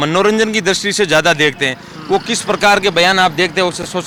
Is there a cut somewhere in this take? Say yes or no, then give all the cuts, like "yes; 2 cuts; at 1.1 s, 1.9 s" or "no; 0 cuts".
no; 0 cuts